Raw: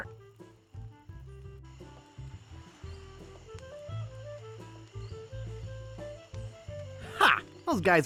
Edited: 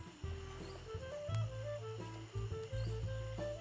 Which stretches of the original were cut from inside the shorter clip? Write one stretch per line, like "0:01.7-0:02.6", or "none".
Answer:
none